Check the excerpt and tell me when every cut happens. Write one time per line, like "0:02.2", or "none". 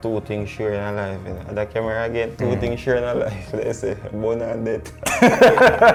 none